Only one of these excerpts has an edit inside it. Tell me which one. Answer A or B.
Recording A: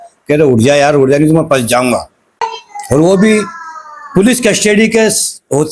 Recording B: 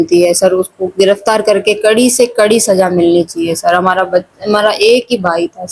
A